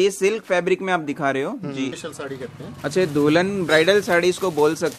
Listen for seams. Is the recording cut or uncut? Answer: cut